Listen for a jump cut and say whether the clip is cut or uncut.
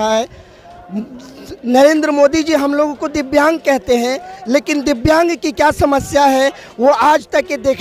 uncut